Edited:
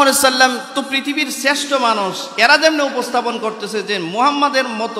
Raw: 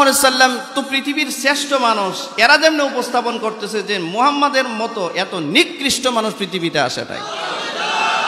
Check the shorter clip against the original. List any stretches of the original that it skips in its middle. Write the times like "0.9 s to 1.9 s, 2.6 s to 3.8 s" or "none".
none